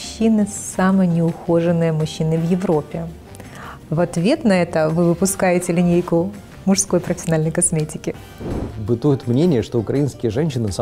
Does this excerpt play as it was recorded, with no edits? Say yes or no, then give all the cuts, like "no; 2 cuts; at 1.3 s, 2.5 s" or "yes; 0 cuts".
no; 1 cut; at 8.6 s